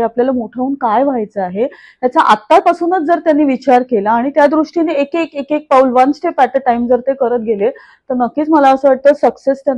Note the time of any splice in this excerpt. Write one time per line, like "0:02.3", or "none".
none